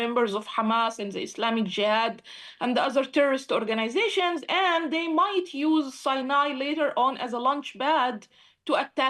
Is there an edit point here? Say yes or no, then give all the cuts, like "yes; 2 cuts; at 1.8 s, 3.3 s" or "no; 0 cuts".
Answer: no; 0 cuts